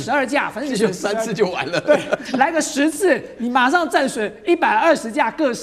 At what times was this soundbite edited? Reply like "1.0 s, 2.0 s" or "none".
none